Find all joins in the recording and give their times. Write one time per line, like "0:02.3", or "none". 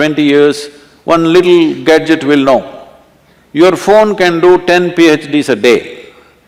none

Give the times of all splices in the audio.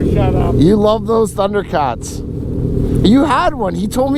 none

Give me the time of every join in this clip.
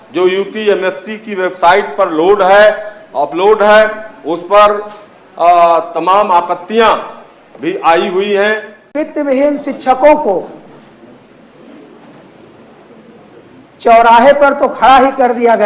0:08.9

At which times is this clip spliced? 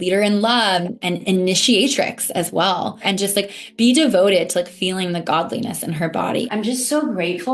0:00.9
0:03.0
0:06.5

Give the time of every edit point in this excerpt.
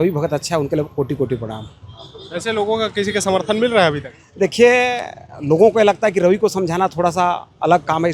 none

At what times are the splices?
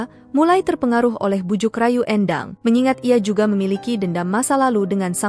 0:02.5

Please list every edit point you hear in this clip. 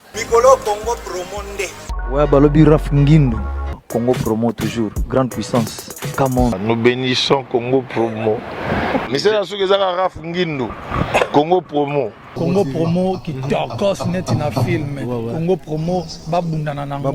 none

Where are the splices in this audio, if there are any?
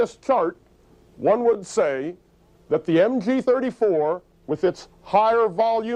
0:02.8

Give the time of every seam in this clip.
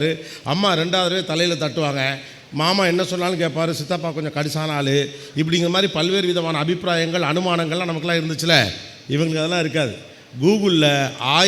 none

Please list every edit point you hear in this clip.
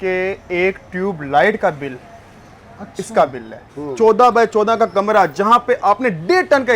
0:03.7

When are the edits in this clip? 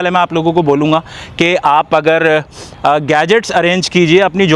none

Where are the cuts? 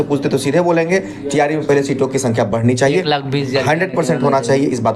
none

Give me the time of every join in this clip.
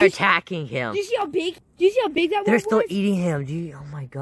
0:01.7

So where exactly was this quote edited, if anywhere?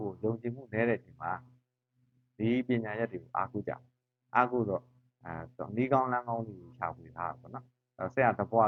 none

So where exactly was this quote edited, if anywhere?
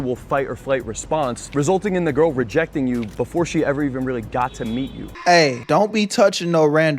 0:05.0

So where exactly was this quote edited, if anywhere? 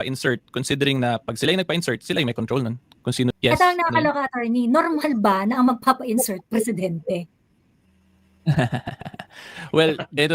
0:03.3

